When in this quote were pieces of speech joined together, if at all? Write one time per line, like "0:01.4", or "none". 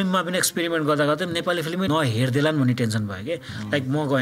0:01.9